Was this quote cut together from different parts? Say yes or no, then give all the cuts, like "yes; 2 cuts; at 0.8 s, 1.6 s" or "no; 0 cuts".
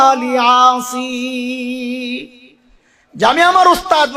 no; 0 cuts